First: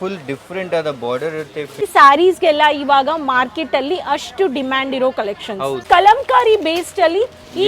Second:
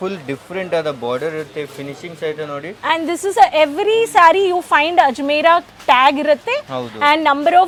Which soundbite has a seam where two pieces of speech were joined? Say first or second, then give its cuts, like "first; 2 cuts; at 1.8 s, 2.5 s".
first; 2 cuts; at 1.9 s, 5.8 s